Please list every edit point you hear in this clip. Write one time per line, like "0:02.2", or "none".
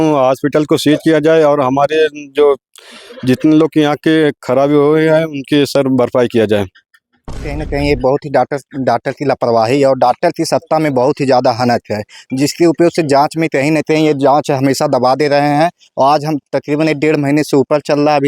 0:07.5